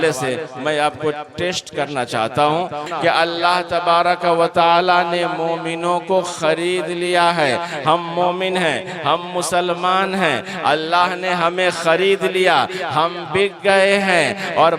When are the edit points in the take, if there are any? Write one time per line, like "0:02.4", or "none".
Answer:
0:02.9